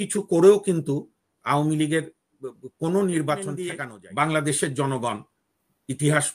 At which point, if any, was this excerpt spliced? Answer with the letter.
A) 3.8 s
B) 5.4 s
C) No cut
A